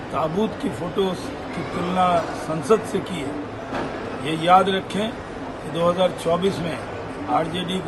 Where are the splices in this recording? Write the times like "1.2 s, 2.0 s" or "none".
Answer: none